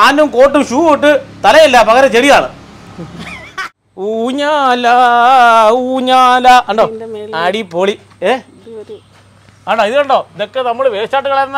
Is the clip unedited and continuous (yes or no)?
no